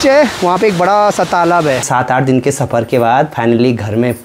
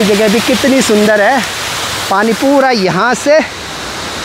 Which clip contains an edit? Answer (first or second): first